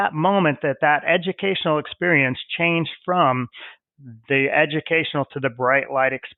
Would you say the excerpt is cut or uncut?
uncut